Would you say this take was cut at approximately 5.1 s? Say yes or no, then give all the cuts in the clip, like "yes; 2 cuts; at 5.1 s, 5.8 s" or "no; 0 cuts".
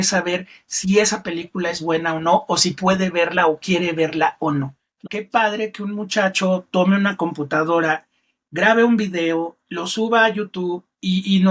yes; 1 cut; at 5.1 s